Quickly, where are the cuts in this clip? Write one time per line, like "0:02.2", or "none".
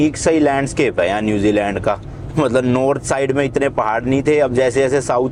none